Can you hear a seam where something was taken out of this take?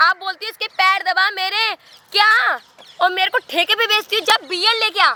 no; 0 cuts

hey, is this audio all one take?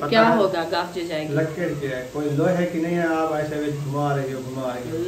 yes; 0 cuts

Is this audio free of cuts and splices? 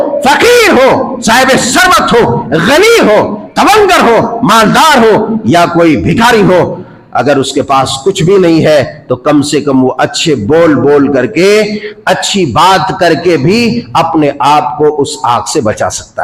yes; 0 cuts

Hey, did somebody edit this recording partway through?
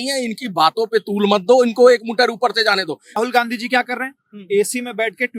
yes; 1 cut; at 3.2 s

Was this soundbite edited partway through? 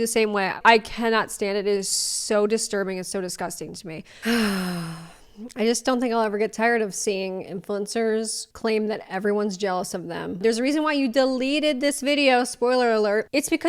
yes; 3 cuts; at 4.2 s, 6.9 s, 10.4 s

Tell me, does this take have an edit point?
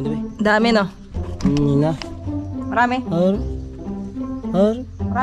no; 0 cuts

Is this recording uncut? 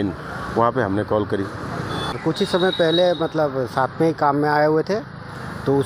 no; 1 cut; at 2.2 s

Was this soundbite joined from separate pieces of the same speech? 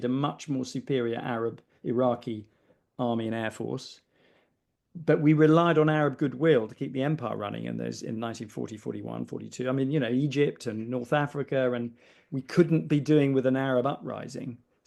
no; 0 cuts

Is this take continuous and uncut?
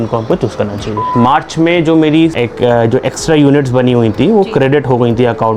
no; 2 cuts; at 1.1 s, 2.4 s

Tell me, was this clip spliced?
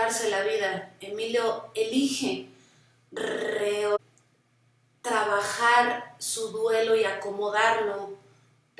yes; 1 cut; at 4.0 s

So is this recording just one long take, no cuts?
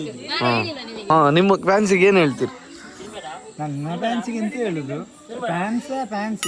no; 1 cut; at 1.1 s

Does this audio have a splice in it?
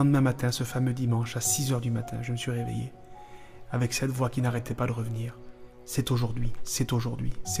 no; 0 cuts

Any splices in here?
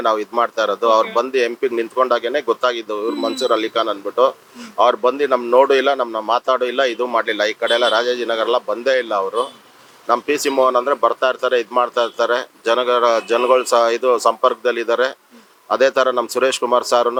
no; 0 cuts

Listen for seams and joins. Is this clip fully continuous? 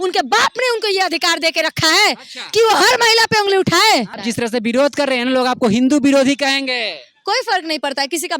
no; 1 cut; at 4.2 s

